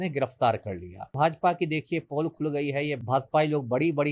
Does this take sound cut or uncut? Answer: cut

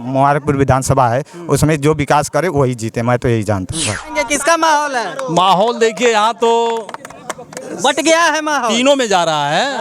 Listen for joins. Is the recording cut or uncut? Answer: cut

